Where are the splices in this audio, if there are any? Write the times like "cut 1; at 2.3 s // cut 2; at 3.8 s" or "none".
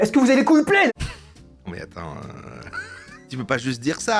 cut 1; at 0.9 s // cut 2; at 3.2 s